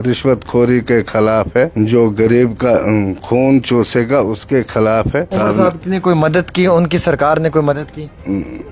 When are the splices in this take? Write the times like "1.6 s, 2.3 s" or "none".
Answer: 1.7 s, 5.3 s